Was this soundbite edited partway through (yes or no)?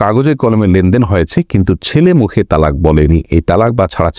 no